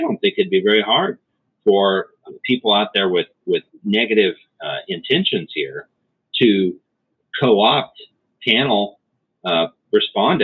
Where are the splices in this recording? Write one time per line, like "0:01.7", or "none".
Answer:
0:02.2
0:03.7